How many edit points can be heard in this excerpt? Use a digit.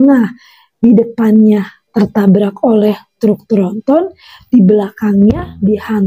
0